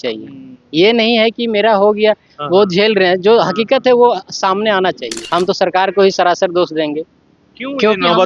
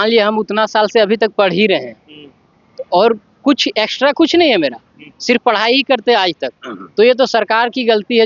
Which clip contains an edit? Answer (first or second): first